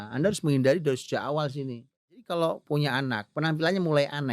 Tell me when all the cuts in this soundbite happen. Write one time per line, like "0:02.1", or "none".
0:02.3